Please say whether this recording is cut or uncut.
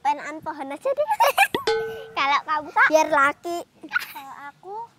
uncut